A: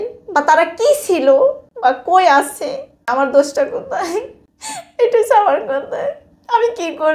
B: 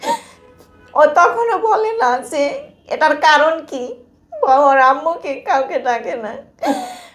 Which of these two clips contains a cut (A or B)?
A